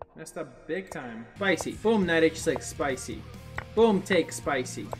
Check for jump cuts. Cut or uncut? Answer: cut